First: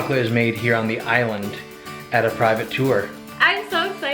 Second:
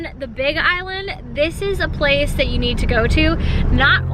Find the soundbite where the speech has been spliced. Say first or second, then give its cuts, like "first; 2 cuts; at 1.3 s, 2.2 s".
first; 1 cut; at 3.2 s